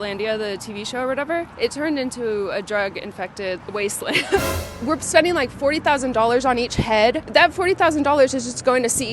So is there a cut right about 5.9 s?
no; 2 cuts; at 4.6 s, 7.2 s

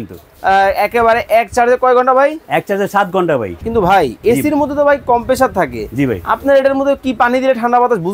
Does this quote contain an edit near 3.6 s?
yes; 1 cut; at 3.6 s

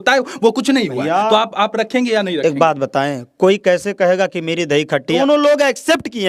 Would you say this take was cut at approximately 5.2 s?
yes; 1 cut; at 5.2 s

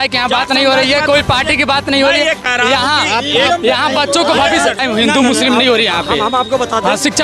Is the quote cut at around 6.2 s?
no; 1 cut; at 4.8 s

